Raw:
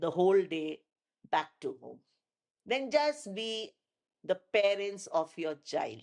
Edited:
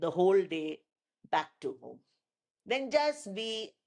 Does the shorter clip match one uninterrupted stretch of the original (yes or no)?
yes